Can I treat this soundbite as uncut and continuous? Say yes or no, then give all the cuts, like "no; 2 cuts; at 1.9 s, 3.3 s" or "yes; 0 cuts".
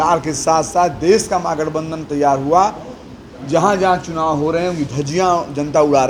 yes; 0 cuts